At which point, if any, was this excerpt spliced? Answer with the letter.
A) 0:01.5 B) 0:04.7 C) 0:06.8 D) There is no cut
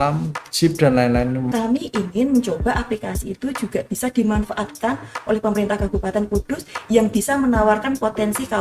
A